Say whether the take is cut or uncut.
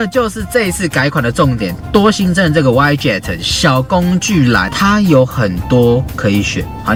uncut